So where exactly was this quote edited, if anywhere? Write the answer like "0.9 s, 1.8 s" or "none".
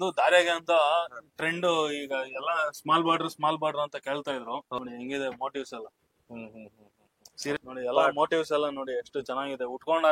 4.8 s, 7.6 s